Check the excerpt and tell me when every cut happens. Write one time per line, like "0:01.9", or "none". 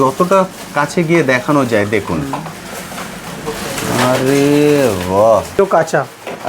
0:05.6